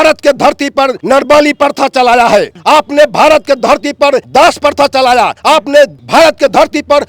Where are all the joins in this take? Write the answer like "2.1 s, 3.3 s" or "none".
1.0 s, 2.5 s, 4.2 s, 5.5 s